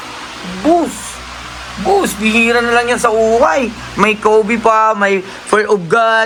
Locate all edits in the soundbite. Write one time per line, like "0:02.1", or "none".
none